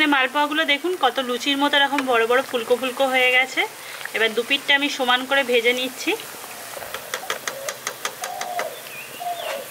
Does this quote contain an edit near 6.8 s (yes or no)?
yes